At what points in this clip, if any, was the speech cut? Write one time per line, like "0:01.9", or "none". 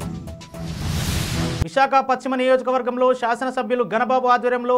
none